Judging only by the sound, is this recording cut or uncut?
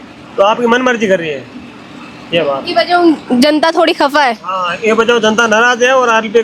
uncut